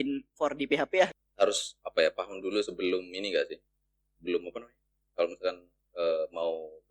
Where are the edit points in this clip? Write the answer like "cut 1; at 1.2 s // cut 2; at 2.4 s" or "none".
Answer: cut 1; at 1.1 s